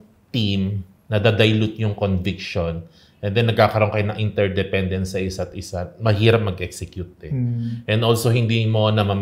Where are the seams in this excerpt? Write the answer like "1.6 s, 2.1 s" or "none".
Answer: none